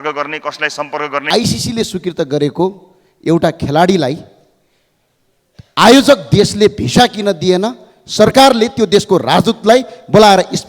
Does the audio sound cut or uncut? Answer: cut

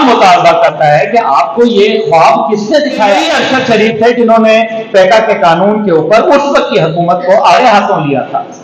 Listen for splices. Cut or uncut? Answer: cut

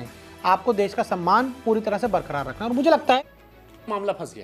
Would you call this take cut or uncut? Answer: cut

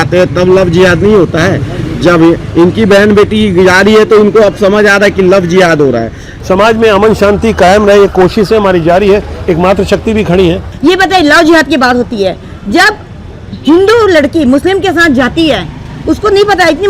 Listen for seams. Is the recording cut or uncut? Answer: uncut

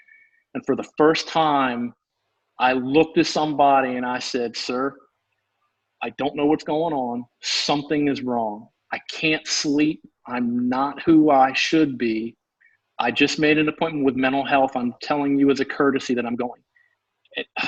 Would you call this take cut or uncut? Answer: uncut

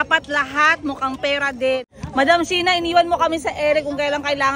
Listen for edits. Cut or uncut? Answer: cut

